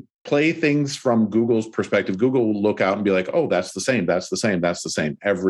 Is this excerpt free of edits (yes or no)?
yes